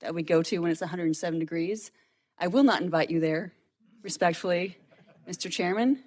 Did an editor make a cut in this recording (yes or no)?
no